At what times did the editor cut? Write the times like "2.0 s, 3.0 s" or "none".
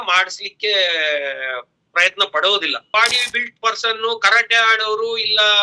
2.9 s